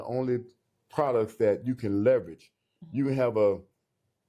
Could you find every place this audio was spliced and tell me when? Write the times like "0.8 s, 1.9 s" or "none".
none